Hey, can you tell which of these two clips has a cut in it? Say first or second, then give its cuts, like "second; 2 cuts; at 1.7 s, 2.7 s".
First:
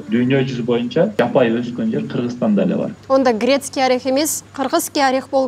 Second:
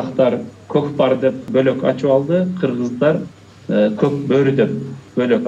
first; 2 cuts; at 1.1 s, 3.0 s